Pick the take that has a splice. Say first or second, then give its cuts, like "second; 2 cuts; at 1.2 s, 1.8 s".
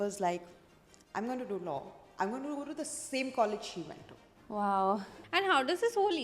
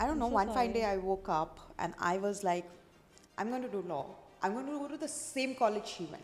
first; 1 cut; at 5.2 s